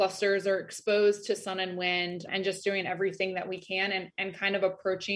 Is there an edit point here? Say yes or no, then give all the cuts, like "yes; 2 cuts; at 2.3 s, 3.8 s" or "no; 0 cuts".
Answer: no; 0 cuts